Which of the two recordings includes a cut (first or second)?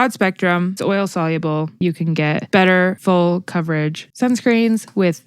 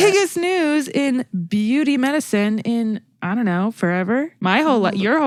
first